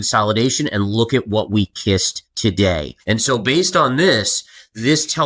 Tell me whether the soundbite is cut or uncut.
cut